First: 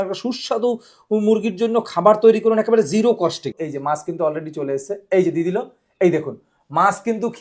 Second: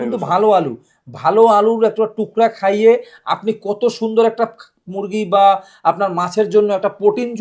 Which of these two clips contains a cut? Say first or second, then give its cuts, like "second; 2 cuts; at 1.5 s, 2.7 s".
first; 1 cut; at 3.6 s